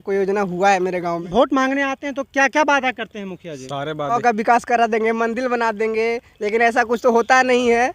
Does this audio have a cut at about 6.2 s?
no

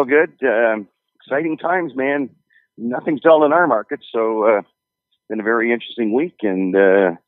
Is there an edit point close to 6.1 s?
yes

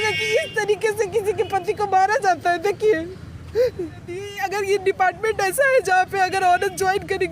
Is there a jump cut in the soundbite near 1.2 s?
no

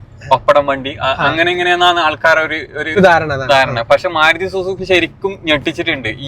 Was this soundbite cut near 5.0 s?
no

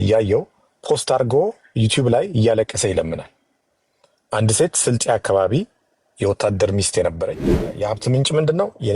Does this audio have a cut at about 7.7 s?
yes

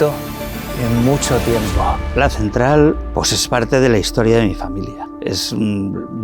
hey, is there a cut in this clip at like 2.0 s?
yes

